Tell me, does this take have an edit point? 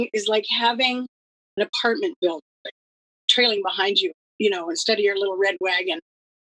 no; 0 cuts

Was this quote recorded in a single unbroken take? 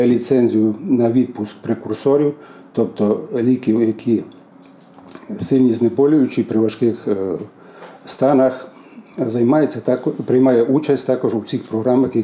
yes; 0 cuts

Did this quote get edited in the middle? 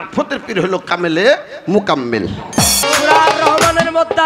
yes; 1 cut; at 2.8 s

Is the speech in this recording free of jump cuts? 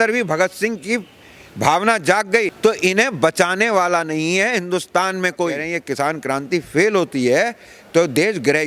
no; 2 cuts; at 2.5 s, 5.6 s

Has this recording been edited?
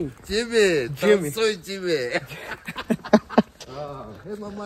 yes; 1 cut; at 3.5 s

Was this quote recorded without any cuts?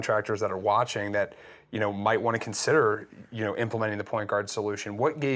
yes; 0 cuts

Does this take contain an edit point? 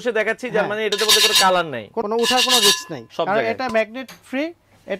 yes; 2 cuts; at 2.0 s, 3.0 s

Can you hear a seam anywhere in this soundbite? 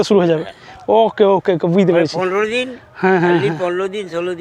no; 0 cuts

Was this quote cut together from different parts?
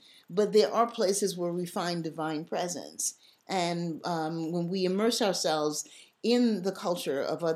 no; 0 cuts

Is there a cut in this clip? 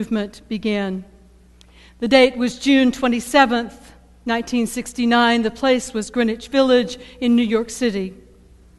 yes; 1 cut; at 3.7 s

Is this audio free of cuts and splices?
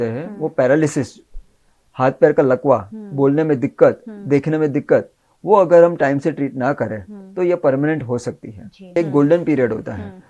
no; 1 cut; at 9.0 s

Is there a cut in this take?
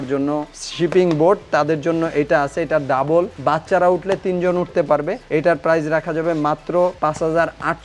no; 0 cuts

